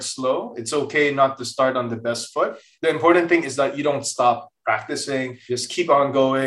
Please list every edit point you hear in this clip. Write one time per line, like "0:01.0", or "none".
0:02.7
0:05.4